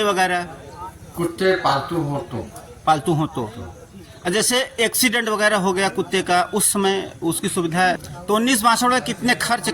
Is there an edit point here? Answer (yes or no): yes